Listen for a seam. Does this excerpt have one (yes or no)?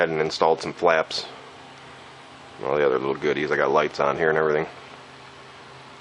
no